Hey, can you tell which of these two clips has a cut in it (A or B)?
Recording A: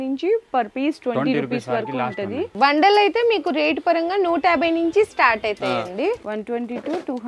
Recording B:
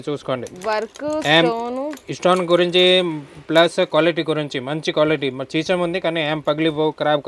A